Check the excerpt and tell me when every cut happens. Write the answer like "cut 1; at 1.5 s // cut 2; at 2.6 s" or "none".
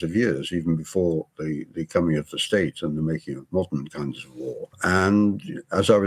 cut 1; at 4.8 s